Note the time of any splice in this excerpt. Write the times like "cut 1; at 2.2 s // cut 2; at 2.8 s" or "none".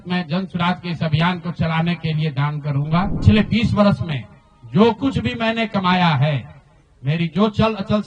cut 1; at 3.2 s